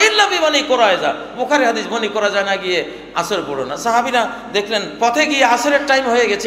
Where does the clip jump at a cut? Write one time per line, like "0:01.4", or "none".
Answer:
0:04.9